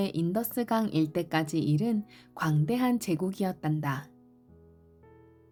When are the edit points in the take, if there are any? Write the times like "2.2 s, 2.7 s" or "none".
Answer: none